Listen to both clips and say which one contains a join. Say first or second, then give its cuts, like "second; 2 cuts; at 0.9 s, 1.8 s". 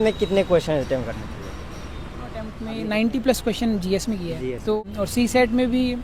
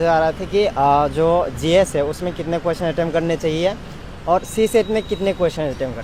first; 2 cuts; at 2.6 s, 4.8 s